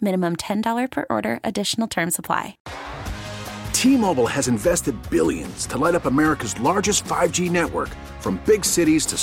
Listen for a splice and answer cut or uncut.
cut